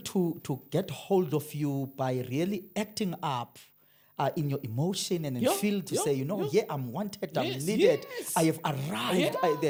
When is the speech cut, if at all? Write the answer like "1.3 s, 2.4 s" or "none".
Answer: none

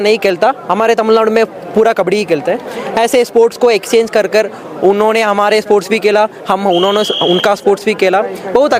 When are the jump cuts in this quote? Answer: none

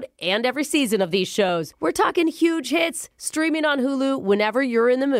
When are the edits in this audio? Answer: none

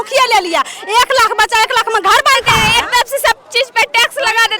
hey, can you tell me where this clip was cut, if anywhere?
2.5 s

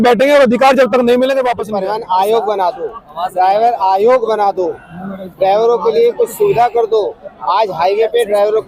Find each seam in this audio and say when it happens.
1.7 s

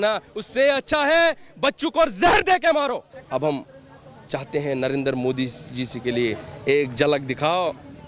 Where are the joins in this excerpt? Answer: 3.1 s

